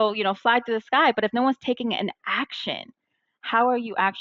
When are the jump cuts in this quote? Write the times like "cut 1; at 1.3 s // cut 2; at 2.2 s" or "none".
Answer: none